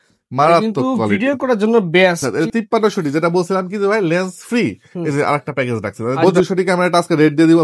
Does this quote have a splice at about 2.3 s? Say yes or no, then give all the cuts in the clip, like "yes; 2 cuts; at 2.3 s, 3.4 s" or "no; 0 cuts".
yes; 2 cuts; at 2.3 s, 6.2 s